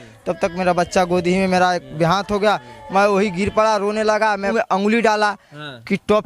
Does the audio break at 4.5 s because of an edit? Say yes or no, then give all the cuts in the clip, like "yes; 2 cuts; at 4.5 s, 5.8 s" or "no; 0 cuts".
yes; 1 cut; at 4.5 s